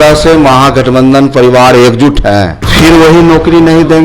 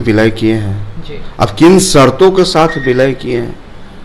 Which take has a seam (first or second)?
first